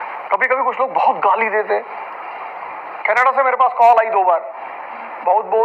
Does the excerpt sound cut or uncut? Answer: uncut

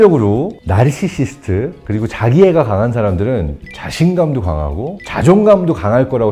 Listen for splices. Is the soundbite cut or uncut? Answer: uncut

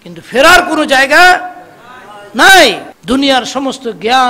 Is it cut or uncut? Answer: cut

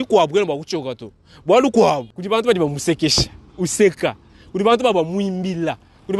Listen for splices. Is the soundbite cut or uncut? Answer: cut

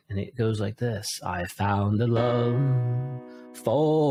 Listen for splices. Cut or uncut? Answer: uncut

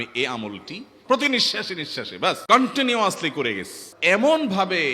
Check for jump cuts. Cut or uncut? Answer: cut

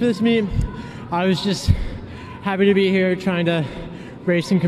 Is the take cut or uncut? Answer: cut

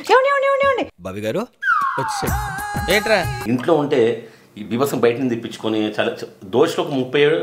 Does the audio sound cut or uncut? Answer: cut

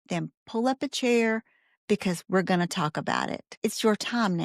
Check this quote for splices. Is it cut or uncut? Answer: cut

